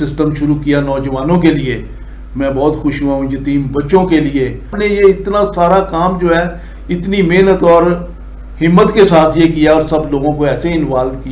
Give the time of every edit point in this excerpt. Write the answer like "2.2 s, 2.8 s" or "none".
none